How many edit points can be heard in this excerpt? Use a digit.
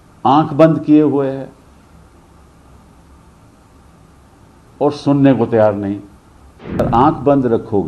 1